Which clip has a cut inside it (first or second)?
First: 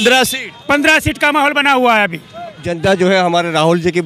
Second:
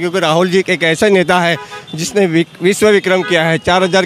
first